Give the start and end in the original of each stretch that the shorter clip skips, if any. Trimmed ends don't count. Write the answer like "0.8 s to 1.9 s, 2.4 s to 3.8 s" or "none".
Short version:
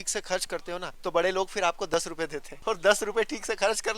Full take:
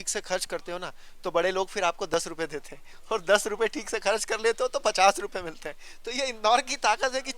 0.9 s to 1.1 s, 2.7 s to 2.9 s